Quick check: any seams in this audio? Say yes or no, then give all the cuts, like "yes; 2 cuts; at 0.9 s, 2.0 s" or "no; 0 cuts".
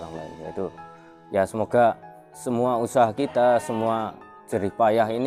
no; 0 cuts